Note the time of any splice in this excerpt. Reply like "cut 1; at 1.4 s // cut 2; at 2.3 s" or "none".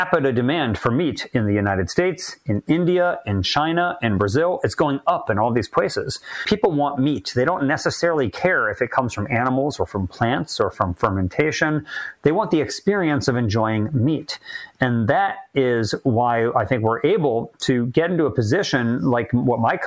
cut 1; at 6.4 s

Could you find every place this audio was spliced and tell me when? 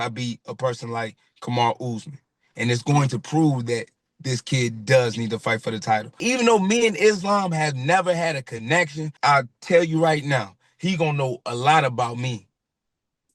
cut 1; at 6.2 s // cut 2; at 9.1 s

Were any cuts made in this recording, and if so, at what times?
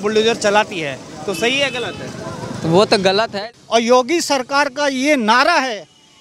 cut 1; at 3.3 s

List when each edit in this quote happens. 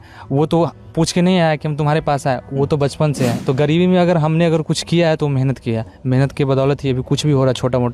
cut 1; at 3.4 s

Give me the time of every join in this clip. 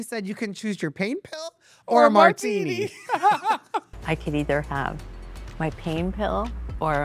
cut 1; at 4.0 s

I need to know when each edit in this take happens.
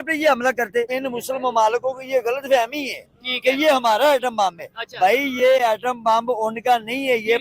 cut 1; at 0.9 s

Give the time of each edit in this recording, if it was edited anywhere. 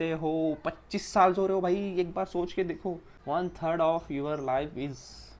cut 1; at 3.1 s

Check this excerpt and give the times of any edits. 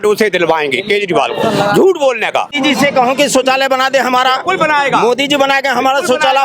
cut 1; at 2.5 s

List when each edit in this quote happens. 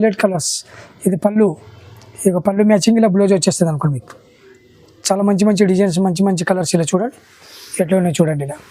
none

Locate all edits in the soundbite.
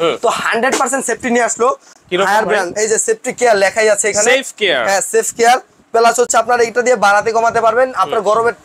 none

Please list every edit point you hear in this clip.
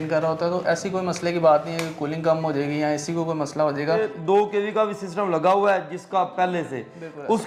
cut 1; at 4.1 s

